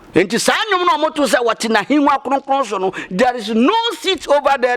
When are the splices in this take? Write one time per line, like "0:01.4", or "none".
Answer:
none